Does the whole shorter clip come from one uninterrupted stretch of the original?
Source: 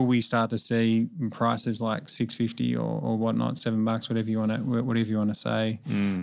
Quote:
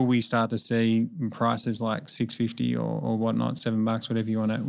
yes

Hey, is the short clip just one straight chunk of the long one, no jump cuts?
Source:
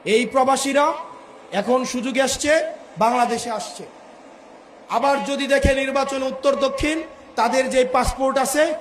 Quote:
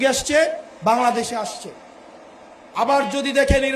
yes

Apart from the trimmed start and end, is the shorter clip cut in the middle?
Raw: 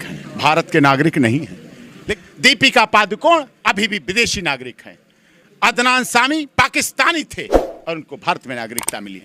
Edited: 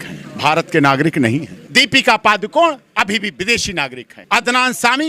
yes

